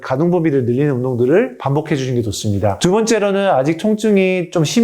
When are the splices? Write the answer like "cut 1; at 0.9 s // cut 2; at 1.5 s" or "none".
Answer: none